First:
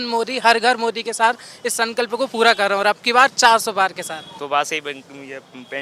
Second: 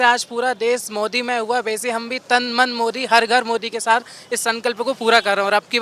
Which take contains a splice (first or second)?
first